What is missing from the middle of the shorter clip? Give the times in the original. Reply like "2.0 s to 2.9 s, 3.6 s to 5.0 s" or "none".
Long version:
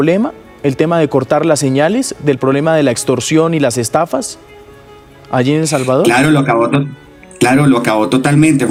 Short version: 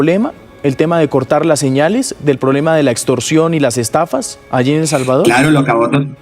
4.4 s to 5.2 s